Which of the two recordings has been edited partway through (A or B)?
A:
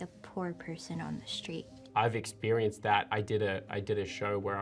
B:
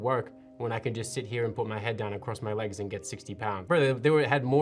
B